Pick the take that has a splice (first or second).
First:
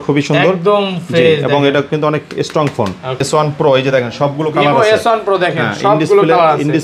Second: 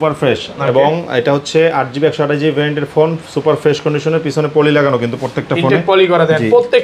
first